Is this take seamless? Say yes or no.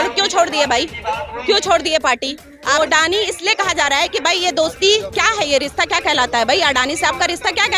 no